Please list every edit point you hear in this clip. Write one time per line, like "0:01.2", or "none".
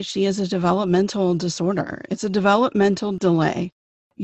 0:03.2